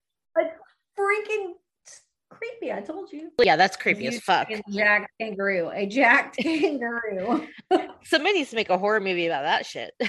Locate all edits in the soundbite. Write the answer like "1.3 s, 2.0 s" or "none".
3.3 s